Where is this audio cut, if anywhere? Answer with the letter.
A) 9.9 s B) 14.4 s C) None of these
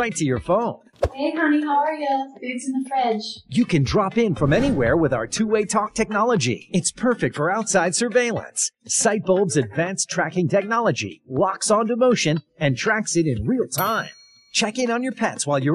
B